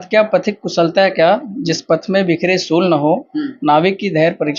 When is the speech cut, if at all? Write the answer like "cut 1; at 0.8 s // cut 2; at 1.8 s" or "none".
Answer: none